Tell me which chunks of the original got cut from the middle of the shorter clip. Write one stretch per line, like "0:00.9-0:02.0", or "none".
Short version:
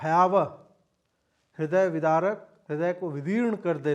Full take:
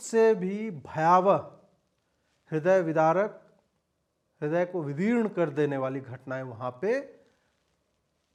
0:03.5-0:04.3